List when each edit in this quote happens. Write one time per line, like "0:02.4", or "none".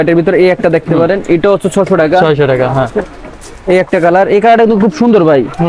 none